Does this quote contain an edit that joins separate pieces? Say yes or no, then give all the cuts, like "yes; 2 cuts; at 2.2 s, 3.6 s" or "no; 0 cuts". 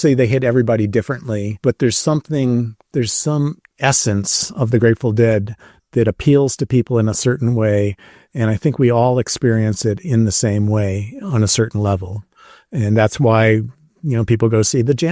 yes; 2 cuts; at 1.5 s, 2.8 s